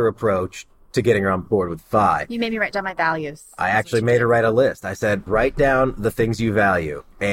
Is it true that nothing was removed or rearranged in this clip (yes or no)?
no